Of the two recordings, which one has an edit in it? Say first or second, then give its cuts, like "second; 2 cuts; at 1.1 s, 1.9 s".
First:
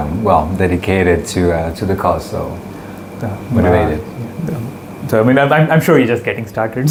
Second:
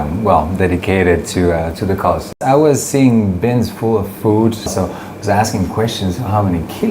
second; 2 cuts; at 2.3 s, 4.7 s